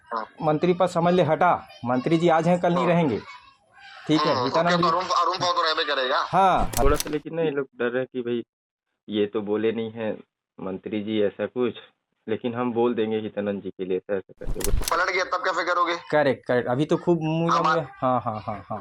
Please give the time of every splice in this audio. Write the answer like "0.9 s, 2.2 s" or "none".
6.8 s, 14.7 s